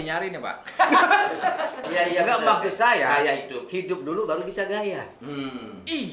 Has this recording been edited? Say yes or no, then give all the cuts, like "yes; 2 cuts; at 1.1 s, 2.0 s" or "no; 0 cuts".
yes; 1 cut; at 1.8 s